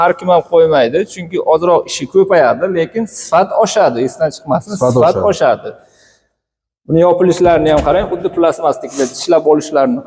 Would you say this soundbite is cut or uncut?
uncut